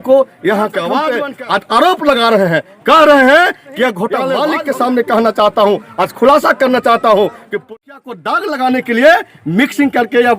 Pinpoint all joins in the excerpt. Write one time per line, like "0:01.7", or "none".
0:01.1
0:04.3
0:07.7

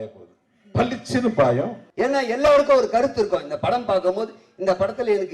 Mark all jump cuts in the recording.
0:01.8

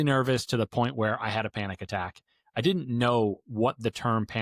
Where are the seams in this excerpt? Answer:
none

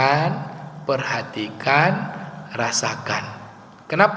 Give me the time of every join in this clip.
none

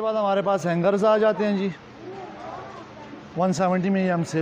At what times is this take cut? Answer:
none

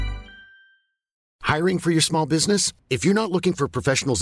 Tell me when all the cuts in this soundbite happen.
0:01.2

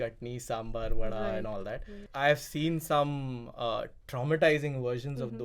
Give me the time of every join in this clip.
0:02.0

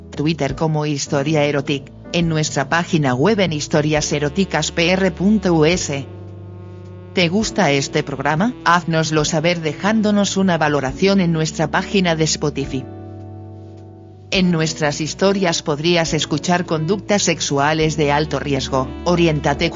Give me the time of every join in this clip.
0:12.8
0:14.3

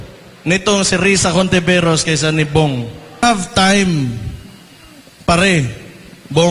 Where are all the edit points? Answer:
0:03.2

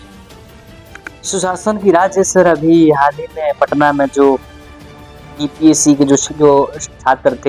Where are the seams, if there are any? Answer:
0:01.1

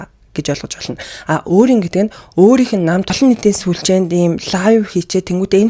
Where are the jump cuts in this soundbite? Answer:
0:03.1

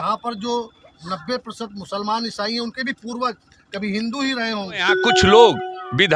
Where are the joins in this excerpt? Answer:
0:05.0

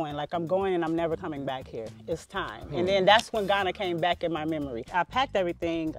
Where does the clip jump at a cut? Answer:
0:04.9

